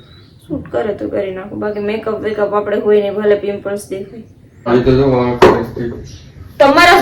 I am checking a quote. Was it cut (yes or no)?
yes